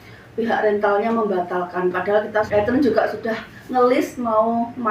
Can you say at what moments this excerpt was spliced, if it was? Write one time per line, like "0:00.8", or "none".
0:02.5